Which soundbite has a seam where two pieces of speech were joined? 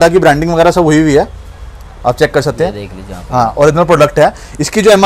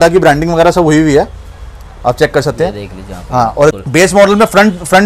second; 1 cut; at 3.7 s

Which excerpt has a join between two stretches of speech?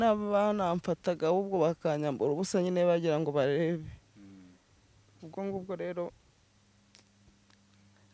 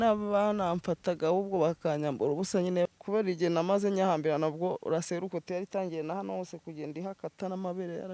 second; 1 cut; at 2.9 s

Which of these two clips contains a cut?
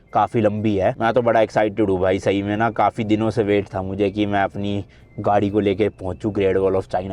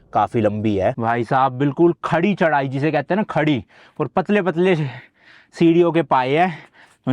second; 1 cut; at 1.0 s

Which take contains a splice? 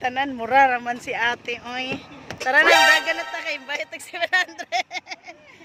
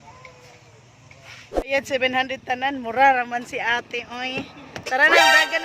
second; 1 cut; at 1.5 s

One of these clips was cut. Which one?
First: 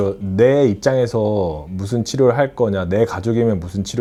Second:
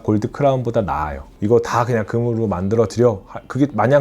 second; 1 cut; at 1.3 s

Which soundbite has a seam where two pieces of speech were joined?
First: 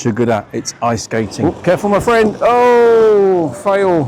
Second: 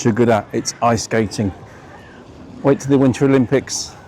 first; 1 cut; at 1.3 s

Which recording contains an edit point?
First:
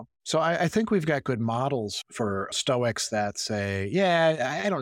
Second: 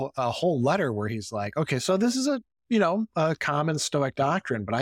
first; 1 cut; at 2.0 s

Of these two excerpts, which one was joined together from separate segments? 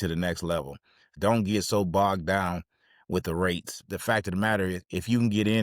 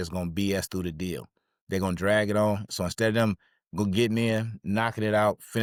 first; 2 cuts; at 1.1 s, 3.9 s

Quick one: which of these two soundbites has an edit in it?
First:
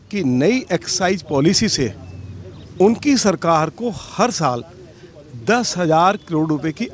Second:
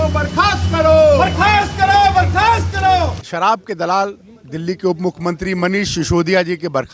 second; 1 cut; at 3.2 s

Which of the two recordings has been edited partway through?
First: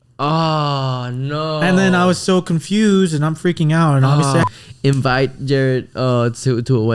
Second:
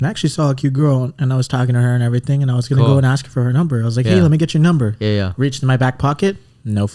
first; 1 cut; at 4.4 s

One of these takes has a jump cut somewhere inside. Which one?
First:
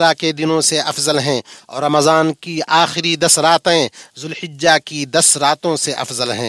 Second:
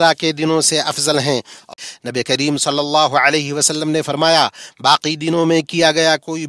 second; 1 cut; at 1.7 s

